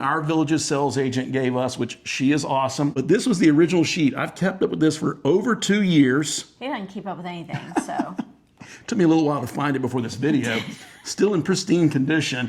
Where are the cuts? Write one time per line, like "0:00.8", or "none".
0:02.9